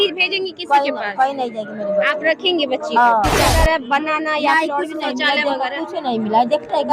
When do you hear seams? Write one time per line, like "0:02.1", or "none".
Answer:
0:03.5